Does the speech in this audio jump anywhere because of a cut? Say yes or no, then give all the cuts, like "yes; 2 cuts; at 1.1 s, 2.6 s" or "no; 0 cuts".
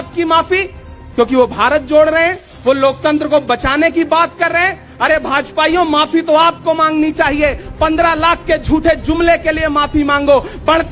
no; 0 cuts